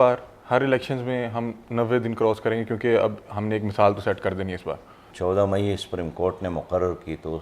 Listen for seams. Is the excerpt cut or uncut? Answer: cut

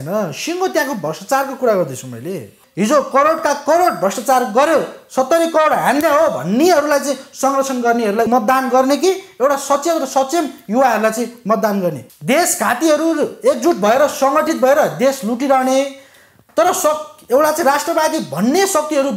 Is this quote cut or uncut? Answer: cut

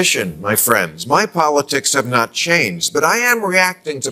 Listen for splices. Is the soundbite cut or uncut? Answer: uncut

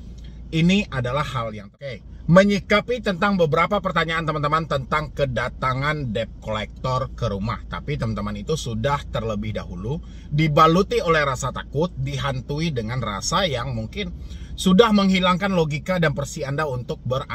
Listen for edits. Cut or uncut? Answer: cut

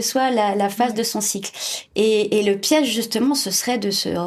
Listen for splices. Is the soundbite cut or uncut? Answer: uncut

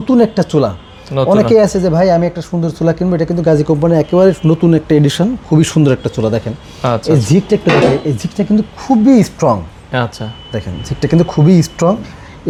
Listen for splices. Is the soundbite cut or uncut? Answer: uncut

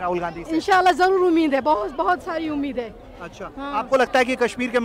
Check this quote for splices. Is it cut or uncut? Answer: uncut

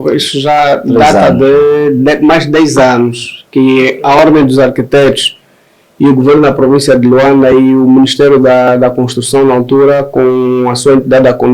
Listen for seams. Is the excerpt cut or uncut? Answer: uncut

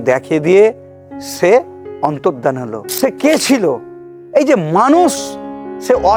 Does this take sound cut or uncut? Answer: cut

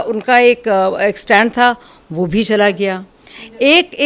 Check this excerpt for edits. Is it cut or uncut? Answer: uncut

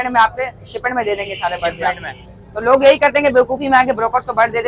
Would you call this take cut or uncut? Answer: uncut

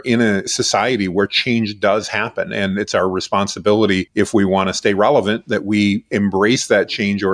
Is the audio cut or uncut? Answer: cut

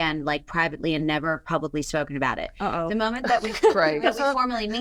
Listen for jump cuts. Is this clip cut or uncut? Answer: uncut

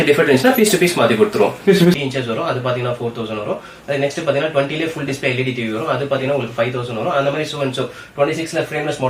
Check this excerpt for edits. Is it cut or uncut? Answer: cut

